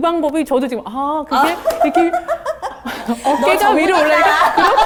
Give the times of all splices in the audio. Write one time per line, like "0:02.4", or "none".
none

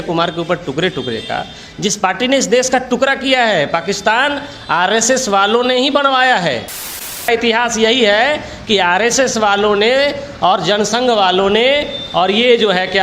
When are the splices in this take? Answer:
0:07.3

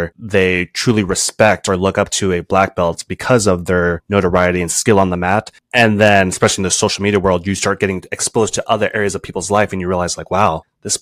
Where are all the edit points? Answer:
0:04.0

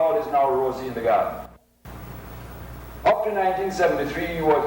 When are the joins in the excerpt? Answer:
0:01.6

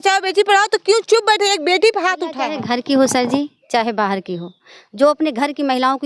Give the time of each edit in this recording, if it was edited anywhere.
0:02.4

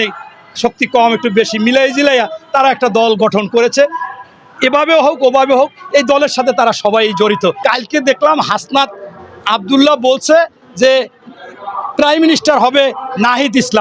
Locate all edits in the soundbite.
0:07.6

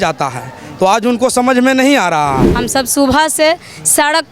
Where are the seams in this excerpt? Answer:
0:02.5

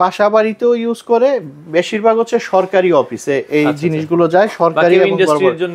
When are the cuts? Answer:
none

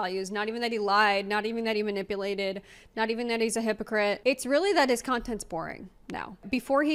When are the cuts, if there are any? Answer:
none

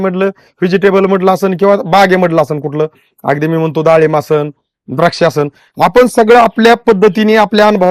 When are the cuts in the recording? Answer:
none

